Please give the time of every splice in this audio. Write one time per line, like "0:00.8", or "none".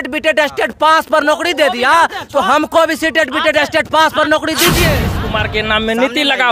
0:05.1

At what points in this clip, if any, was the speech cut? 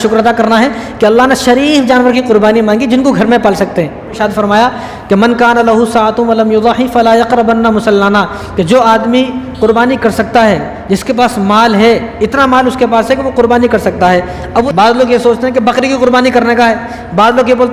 0:04.2
0:14.7

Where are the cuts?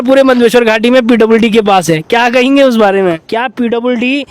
0:03.0

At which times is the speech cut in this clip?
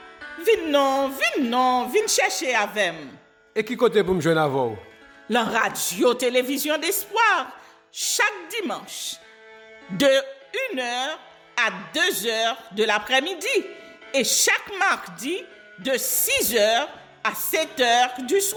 none

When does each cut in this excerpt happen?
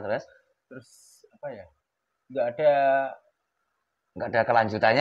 none

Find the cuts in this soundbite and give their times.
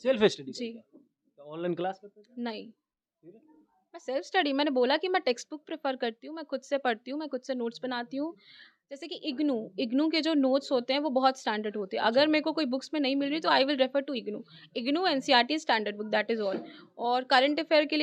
none

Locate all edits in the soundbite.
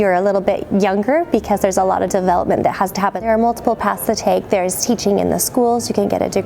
0:03.2

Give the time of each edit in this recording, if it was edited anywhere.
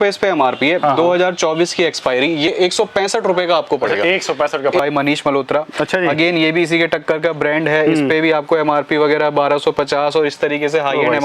0:02.5
0:04.8

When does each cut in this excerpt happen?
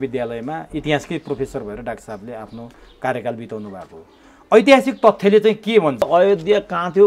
0:06.0

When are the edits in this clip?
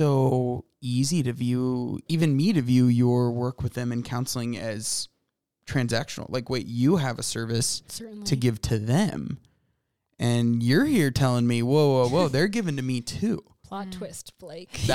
none

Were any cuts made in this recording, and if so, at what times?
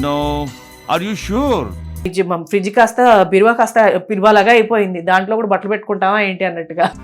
0:02.1

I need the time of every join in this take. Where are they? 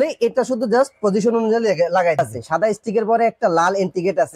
0:02.3

